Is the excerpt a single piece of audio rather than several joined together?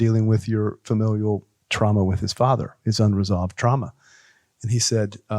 no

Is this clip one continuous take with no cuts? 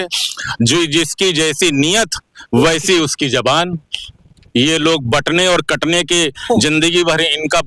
yes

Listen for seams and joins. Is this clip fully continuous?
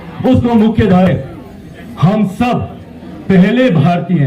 no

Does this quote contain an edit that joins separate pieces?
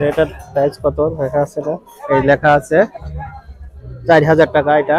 no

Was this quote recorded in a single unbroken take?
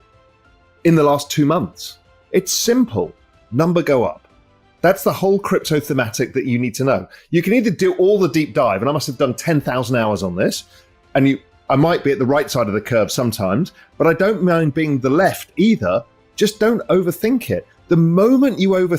no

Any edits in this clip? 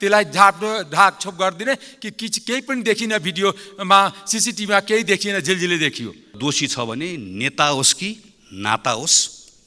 yes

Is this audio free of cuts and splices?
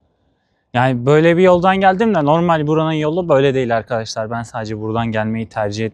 yes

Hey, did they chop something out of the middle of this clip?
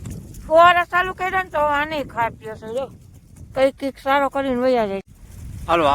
yes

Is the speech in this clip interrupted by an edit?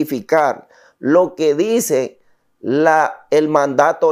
no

